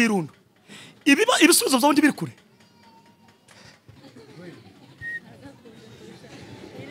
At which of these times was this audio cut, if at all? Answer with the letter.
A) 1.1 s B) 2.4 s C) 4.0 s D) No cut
C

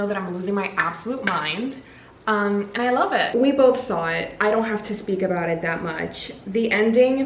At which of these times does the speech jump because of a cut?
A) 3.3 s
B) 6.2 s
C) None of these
A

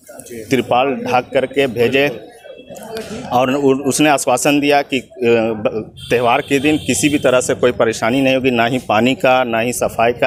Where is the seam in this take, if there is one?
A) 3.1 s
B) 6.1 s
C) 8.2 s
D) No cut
D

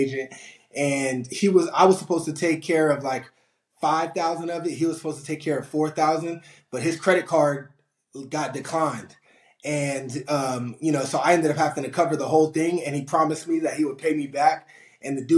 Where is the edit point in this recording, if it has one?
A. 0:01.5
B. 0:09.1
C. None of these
C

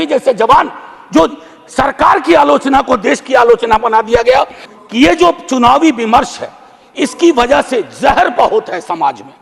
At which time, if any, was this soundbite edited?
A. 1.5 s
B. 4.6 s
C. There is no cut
B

